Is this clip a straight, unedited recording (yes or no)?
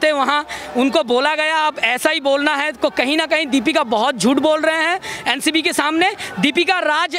yes